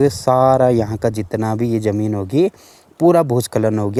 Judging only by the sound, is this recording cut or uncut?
uncut